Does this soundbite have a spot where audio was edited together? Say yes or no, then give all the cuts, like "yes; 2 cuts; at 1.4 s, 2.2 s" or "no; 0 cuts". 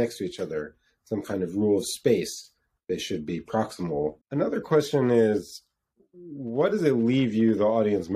yes; 1 cut; at 4.2 s